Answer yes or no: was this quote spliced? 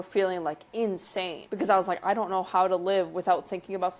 yes